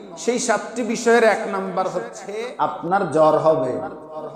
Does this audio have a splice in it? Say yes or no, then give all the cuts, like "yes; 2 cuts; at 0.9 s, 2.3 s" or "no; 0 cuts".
yes; 1 cut; at 2.1 s